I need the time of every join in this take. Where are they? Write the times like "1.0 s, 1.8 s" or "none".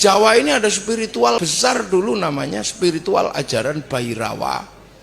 1.5 s

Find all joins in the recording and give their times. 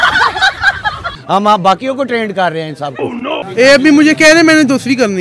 1.1 s, 3.5 s

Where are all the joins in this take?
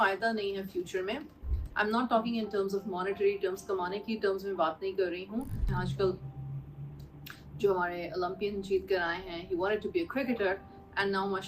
5.6 s

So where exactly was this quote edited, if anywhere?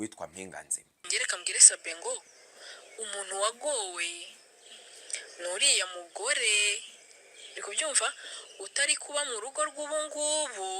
1.1 s

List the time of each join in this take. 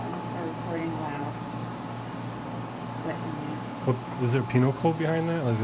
none

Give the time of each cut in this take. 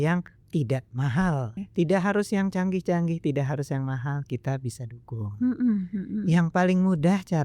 1.6 s

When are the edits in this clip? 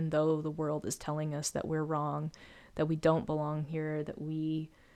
none

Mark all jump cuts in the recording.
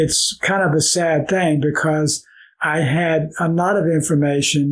none

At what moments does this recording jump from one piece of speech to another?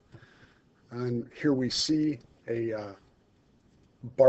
3.2 s

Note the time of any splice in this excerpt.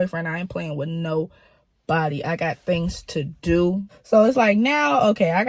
3.9 s

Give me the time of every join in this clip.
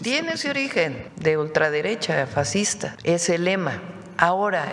1.0 s, 2.9 s

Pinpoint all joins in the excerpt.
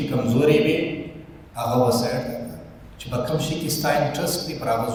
none

